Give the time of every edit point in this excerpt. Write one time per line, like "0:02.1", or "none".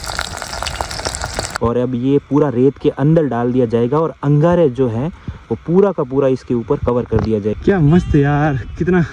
0:01.4
0:07.5